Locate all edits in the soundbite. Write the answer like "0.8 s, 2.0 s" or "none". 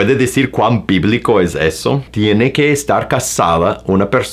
2.1 s

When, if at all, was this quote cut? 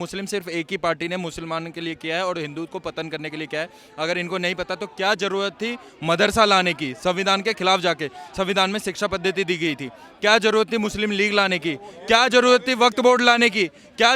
none

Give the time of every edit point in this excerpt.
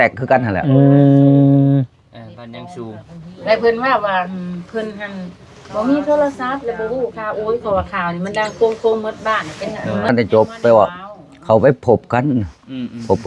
10.1 s

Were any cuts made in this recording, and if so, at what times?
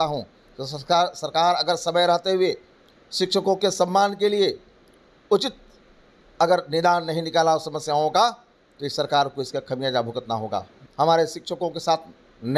10.8 s

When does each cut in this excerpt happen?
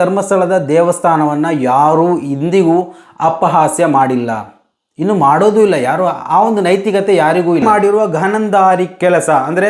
7.6 s

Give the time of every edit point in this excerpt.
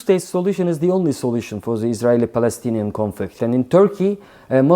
3.3 s

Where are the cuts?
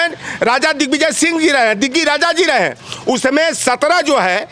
none

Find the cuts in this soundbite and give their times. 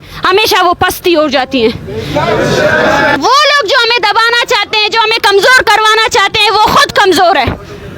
3.2 s

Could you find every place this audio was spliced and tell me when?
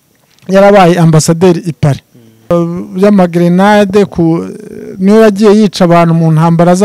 2.5 s

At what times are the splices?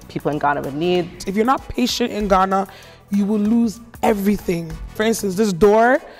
1.2 s, 5.0 s

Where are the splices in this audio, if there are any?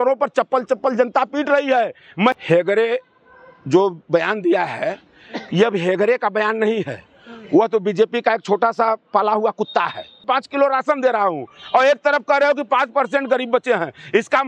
2.3 s, 10.2 s

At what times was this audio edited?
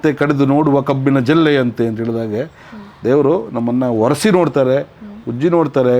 none

